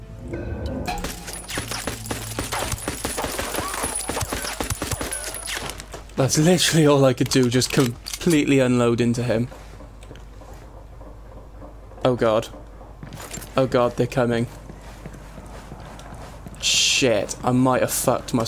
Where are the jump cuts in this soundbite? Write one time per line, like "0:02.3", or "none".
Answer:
none